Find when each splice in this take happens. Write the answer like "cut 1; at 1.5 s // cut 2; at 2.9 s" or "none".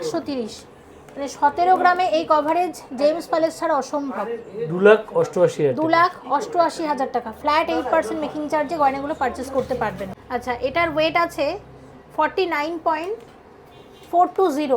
cut 1; at 10.1 s